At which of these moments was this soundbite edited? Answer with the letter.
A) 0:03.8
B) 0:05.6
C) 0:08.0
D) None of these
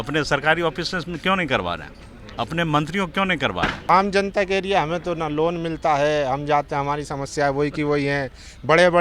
A